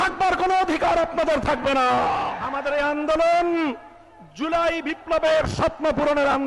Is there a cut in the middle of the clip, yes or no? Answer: yes